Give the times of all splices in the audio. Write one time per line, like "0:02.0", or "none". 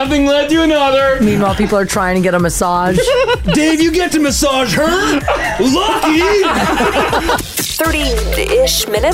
0:07.4